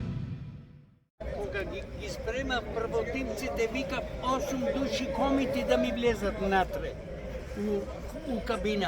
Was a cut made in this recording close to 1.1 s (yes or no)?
yes